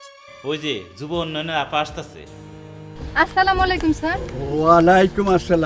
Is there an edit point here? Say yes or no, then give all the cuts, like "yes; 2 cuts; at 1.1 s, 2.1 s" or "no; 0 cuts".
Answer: no; 0 cuts